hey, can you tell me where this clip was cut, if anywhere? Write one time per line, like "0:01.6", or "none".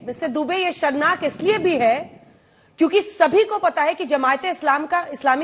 none